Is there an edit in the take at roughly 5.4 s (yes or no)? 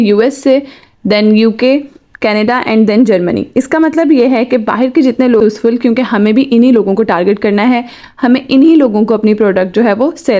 yes